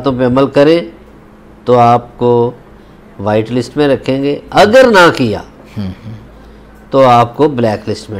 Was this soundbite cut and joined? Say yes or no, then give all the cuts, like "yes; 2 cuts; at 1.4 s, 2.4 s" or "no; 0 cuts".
no; 0 cuts